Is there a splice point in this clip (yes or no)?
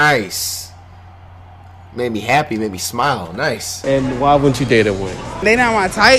yes